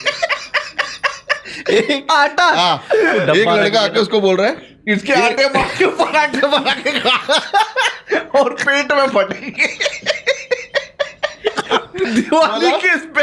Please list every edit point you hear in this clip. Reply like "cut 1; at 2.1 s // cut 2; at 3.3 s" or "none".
cut 1; at 12.1 s